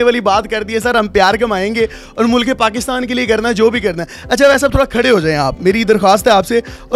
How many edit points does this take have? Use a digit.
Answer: 0